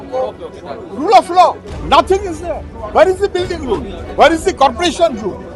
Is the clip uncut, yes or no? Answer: no